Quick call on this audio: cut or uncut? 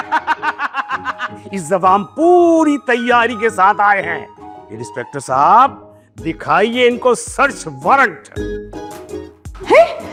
uncut